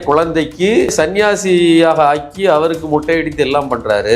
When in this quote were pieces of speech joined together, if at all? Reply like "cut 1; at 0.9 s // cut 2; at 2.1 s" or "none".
cut 1; at 0.9 s